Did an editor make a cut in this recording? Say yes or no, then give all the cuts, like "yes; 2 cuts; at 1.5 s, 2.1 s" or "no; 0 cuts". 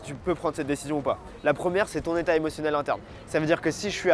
no; 0 cuts